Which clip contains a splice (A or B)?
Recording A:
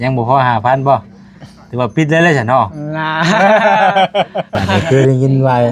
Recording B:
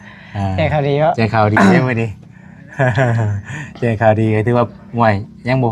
A